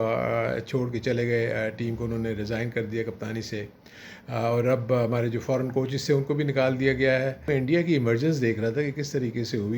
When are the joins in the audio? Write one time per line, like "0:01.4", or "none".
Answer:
0:07.5